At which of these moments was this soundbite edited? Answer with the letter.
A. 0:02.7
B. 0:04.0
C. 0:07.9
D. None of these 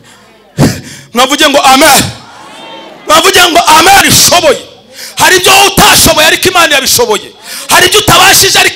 B